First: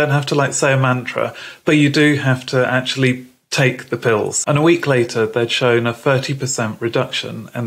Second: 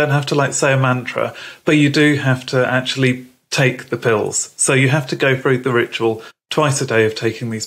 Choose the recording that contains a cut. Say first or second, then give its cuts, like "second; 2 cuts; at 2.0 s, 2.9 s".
first; 1 cut; at 4.4 s